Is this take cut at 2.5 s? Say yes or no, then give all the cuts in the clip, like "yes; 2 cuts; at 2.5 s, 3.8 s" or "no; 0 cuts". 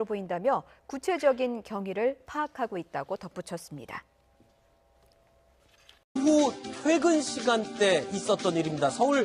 yes; 1 cut; at 2.5 s